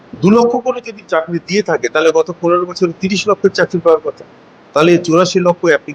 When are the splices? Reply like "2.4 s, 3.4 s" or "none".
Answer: none